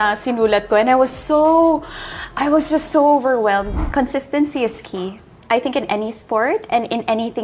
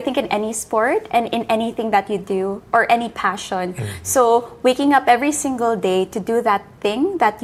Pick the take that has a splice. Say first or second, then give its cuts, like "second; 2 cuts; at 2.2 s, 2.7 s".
first; 1 cut; at 3.7 s